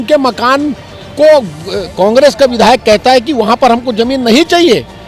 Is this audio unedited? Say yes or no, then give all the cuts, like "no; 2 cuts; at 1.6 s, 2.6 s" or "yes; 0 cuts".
yes; 0 cuts